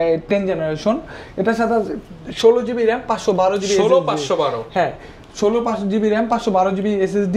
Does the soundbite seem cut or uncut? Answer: uncut